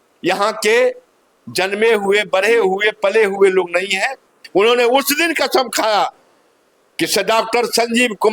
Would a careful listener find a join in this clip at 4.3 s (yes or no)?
yes